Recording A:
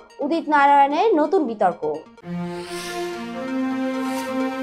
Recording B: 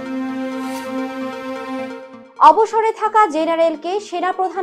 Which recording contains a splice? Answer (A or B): B